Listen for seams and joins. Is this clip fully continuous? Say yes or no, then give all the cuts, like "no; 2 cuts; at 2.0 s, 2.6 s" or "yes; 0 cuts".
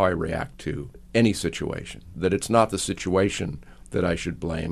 no; 2 cuts; at 0.9 s, 2.1 s